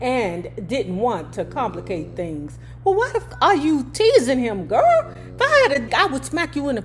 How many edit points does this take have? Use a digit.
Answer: 2